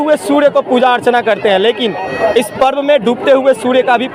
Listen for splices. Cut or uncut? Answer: uncut